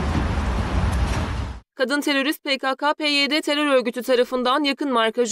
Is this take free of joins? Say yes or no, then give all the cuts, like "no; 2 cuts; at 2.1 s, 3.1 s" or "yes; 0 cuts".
no; 1 cut; at 1.6 s